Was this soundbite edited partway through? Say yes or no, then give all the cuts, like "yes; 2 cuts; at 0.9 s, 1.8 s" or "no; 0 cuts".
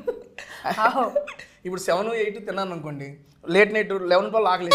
no; 0 cuts